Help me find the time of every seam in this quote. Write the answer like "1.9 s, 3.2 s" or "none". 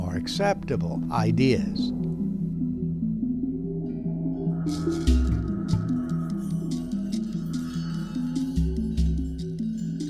8.1 s